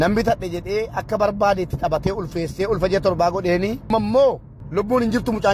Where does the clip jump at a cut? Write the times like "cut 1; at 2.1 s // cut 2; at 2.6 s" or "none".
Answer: cut 1; at 3.9 s // cut 2; at 4.5 s